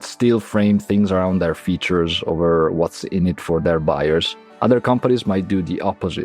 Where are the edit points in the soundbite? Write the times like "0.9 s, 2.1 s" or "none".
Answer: 4.4 s